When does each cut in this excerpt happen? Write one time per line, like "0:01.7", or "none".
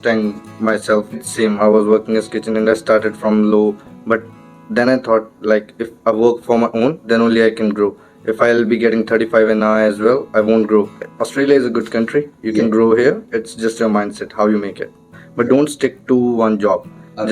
0:01.3
0:11.0
0:15.2